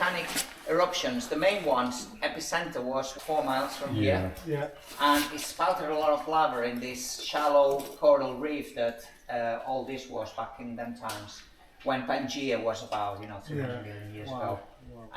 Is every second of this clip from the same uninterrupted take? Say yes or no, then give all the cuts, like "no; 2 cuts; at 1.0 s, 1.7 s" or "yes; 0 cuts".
no; 1 cut; at 3.1 s